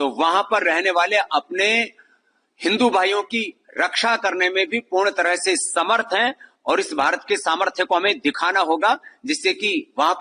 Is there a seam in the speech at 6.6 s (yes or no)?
no